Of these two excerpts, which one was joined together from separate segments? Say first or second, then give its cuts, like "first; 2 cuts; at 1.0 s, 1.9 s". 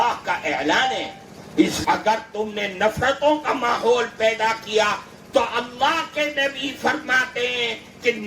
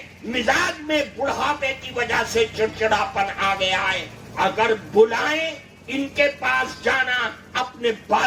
first; 1 cut; at 1.8 s